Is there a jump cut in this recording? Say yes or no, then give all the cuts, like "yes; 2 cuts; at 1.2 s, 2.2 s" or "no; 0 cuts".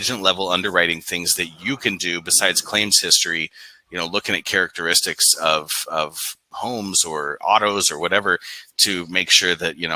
no; 0 cuts